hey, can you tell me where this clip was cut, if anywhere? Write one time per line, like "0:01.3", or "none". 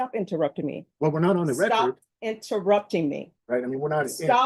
0:03.3